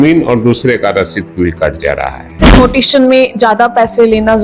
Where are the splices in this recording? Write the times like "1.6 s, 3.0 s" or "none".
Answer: 2.6 s

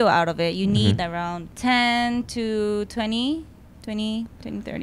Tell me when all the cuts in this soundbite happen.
1.4 s

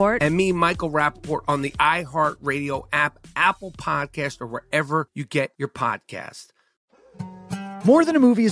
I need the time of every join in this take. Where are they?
7.0 s

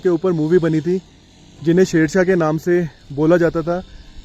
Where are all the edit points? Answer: none

